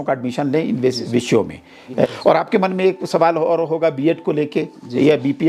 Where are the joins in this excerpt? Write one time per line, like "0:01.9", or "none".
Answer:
0:02.1